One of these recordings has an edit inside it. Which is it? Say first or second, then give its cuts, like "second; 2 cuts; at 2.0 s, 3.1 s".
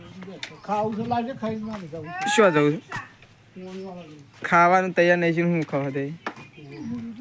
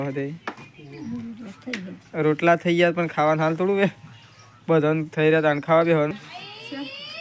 second; 1 cut; at 6.1 s